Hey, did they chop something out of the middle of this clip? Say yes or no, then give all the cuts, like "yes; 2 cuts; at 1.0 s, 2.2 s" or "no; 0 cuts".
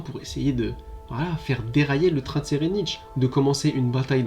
yes; 1 cut; at 3.1 s